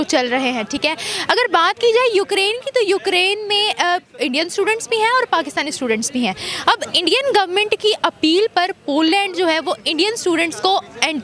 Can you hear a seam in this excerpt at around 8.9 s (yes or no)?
no